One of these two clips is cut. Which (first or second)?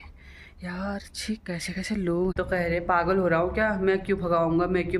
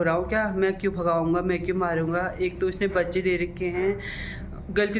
first